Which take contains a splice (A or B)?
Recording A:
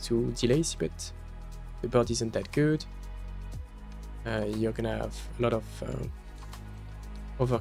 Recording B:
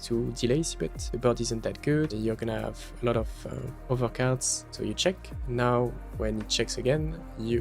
B